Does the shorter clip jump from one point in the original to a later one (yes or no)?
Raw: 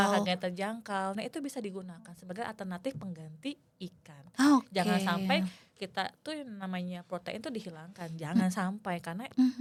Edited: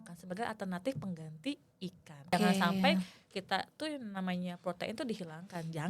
yes